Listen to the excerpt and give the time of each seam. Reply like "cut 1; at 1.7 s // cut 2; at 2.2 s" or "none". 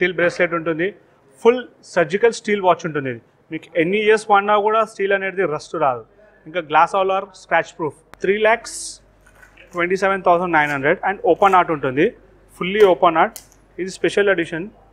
cut 1; at 8.1 s